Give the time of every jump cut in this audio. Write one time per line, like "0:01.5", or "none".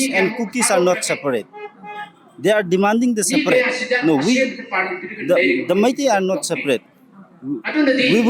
none